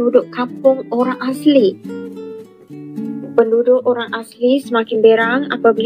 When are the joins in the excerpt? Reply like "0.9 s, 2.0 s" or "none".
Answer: 1.9 s